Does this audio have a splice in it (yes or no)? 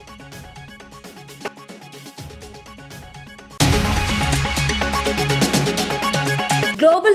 no